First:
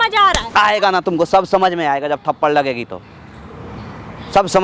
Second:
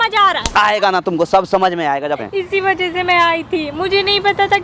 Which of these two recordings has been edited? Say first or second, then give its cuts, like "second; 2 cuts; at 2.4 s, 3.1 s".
second; 1 cut; at 2.2 s